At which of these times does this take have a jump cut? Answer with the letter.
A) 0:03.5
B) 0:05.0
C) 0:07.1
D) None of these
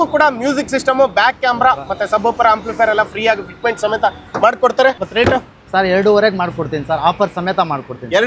B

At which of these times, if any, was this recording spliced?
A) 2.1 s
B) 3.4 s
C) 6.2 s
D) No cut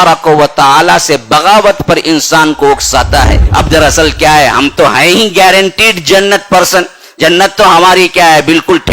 B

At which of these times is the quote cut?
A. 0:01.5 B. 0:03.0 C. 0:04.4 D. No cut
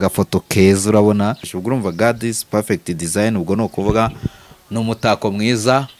A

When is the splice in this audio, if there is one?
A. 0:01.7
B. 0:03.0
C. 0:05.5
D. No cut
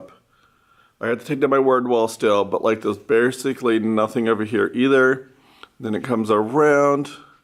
D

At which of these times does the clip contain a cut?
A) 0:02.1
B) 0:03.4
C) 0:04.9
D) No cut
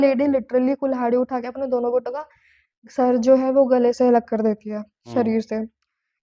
D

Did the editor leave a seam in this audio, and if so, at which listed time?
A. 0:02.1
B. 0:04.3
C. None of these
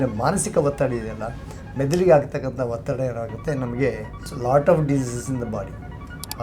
B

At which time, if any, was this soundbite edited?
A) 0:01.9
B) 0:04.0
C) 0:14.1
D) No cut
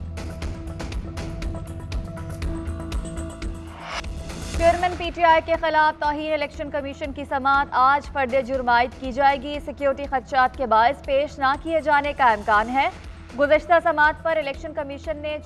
B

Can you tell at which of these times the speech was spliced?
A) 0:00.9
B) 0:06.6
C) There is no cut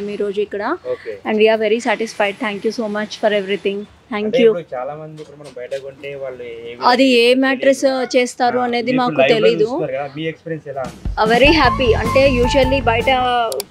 C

